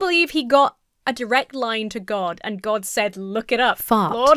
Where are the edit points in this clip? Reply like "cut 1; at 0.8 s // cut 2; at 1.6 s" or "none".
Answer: none